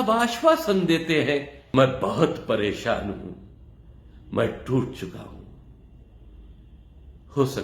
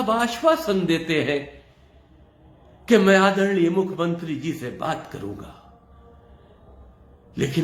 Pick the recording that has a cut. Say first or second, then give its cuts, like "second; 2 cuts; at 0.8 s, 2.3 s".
first; 1 cut; at 1.6 s